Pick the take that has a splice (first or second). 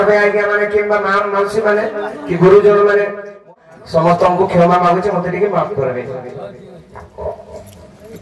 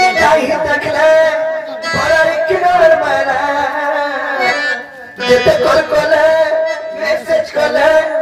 first